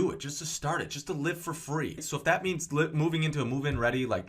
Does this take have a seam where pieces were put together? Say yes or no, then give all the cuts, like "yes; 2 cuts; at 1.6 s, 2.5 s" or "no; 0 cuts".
yes; 1 cut; at 2.0 s